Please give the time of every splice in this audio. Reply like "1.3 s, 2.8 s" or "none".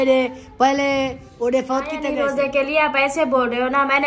2.1 s